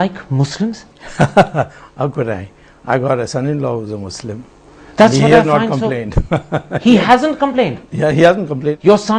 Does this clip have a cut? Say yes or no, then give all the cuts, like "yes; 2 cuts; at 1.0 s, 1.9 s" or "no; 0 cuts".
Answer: yes; 1 cut; at 3.8 s